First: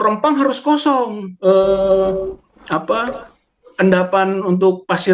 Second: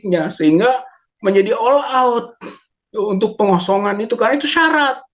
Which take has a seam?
first; 1 cut; at 1.2 s

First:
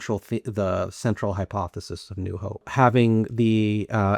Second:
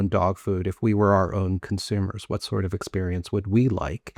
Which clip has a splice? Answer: first; 1 cut; at 2.7 s

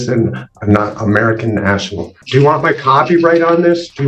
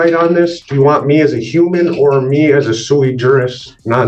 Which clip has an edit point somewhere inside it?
first; 1 cut; at 2.2 s

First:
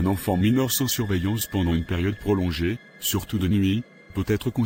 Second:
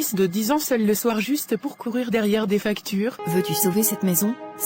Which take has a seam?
second; 1 cut; at 3.2 s

